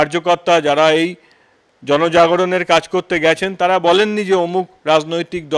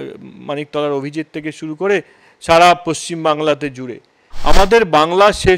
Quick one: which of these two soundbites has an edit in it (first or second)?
second